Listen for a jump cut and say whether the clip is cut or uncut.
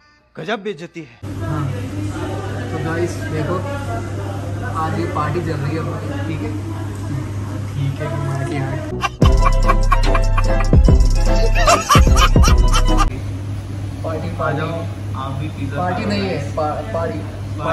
cut